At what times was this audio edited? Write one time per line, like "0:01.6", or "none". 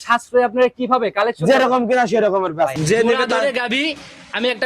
0:02.7